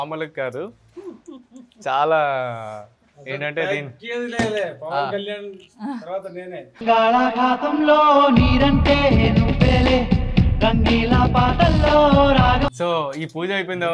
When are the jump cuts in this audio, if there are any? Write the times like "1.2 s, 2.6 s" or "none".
12.7 s